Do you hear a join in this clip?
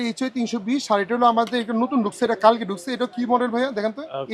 no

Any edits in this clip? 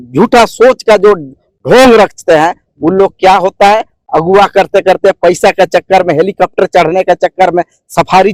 no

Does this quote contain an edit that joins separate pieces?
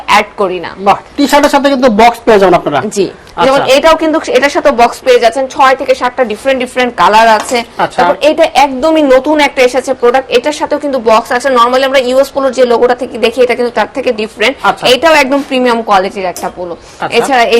no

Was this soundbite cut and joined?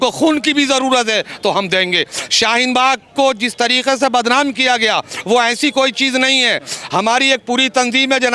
no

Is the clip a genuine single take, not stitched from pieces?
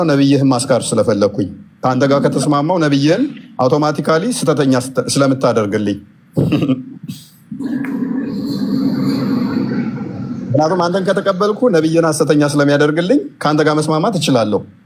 yes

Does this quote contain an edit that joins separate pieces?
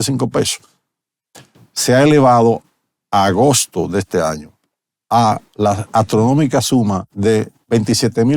no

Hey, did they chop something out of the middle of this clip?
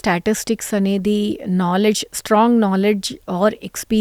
no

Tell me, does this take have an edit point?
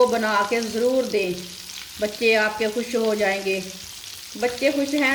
no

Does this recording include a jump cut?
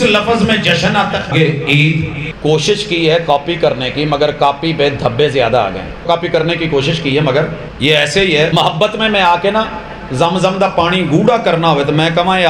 yes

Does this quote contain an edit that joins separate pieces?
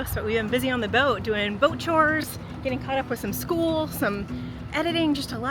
no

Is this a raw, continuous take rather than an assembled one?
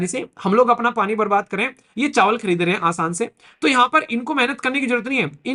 yes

